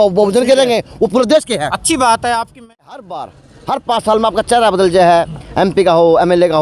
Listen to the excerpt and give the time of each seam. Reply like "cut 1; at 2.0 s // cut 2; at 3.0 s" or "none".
cut 1; at 2.6 s